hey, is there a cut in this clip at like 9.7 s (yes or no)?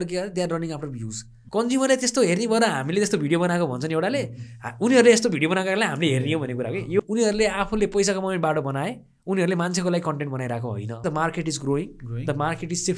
no